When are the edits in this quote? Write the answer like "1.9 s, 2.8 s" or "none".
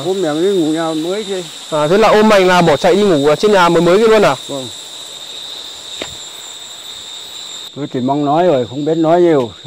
7.7 s